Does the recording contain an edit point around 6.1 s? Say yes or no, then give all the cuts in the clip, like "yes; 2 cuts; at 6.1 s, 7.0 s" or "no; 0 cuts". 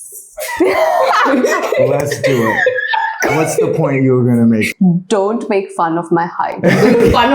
no; 1 cut; at 4.7 s